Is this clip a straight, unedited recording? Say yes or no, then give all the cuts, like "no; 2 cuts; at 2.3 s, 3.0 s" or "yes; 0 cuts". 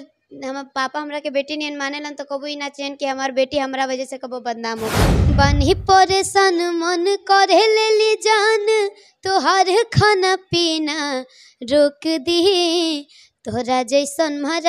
no; 1 cut; at 5.3 s